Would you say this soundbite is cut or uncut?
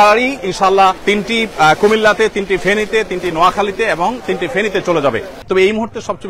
cut